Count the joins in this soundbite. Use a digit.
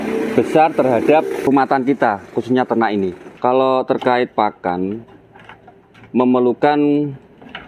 2